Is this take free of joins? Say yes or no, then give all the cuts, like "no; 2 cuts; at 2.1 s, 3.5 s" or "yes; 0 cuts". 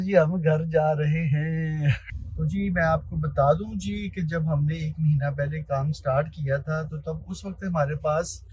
no; 1 cut; at 2.0 s